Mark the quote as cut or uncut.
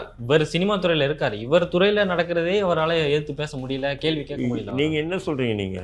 uncut